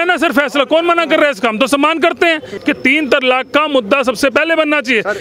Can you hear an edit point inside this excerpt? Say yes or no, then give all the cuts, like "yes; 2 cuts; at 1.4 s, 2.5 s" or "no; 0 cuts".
yes; 1 cut; at 2.5 s